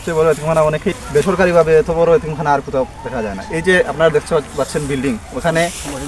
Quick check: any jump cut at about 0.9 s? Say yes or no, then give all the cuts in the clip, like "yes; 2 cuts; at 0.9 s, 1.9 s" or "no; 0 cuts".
yes; 1 cut; at 0.9 s